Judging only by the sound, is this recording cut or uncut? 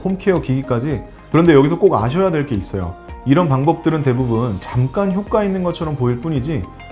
cut